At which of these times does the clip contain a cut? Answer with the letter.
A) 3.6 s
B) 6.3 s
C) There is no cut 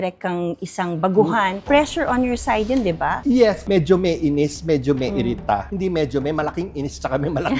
A